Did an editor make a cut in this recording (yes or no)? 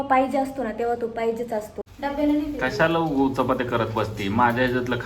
yes